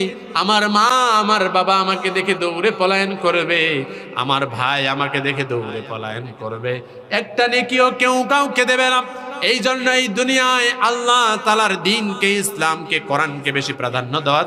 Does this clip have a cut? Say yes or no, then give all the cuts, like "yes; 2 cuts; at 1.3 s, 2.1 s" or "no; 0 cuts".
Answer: no; 0 cuts